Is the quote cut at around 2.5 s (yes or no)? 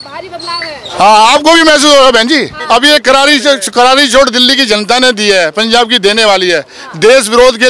yes